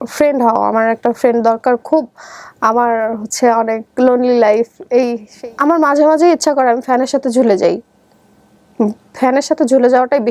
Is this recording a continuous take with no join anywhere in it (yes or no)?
no